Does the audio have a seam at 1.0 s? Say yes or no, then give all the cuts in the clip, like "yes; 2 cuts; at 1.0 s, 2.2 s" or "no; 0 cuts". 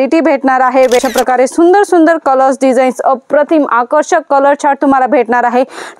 yes; 1 cut; at 1.0 s